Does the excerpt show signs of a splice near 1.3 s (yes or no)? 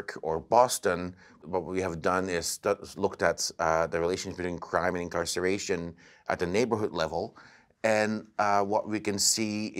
yes